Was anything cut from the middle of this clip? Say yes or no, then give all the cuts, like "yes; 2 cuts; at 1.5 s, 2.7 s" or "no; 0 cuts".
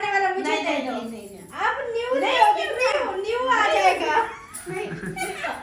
no; 0 cuts